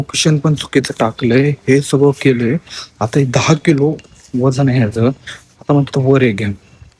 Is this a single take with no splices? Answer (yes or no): yes